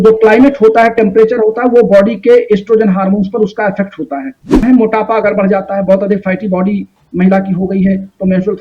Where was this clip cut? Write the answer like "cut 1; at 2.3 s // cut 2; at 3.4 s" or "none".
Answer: cut 1; at 4.6 s